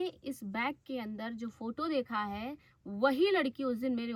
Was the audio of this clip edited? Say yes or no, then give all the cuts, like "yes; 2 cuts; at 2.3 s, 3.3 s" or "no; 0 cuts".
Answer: no; 0 cuts